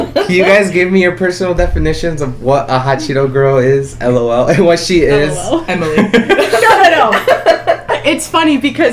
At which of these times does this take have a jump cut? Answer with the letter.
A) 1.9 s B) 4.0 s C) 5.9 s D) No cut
D